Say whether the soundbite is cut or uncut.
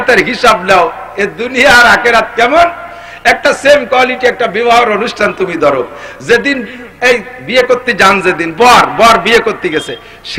uncut